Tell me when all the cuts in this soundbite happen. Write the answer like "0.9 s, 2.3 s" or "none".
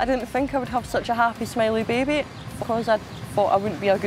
2.4 s